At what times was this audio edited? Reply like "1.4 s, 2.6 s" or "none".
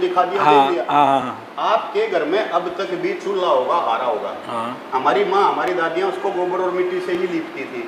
none